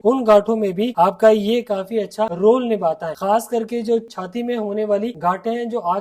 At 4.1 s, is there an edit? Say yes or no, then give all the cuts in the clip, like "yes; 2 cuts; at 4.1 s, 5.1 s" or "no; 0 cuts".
yes; 1 cut; at 4.1 s